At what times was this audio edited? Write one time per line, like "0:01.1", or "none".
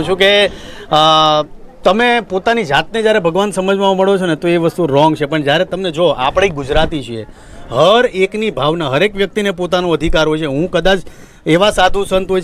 none